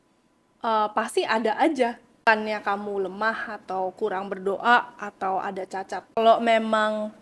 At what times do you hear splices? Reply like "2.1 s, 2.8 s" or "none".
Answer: 2.2 s, 6.2 s